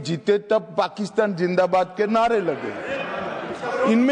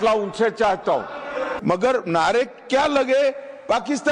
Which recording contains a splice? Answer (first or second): second